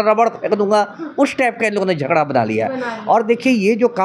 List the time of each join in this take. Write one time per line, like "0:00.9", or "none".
none